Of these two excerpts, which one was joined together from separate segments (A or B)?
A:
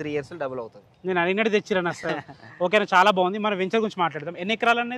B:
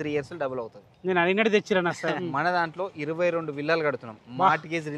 B